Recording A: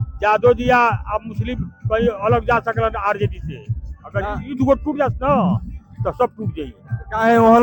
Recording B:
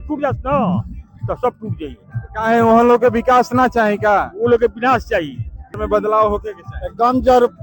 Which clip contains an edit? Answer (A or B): B